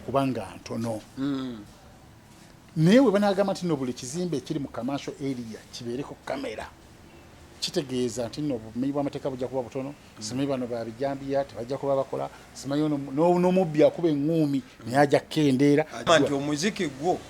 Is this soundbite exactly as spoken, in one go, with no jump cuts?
no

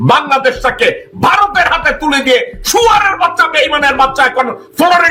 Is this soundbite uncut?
yes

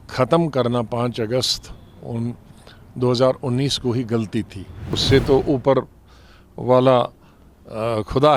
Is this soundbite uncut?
no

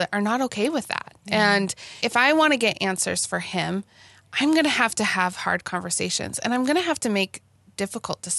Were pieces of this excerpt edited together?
yes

